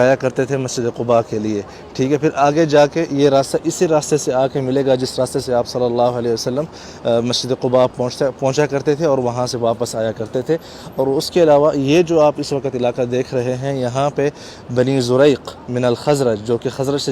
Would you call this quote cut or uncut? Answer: uncut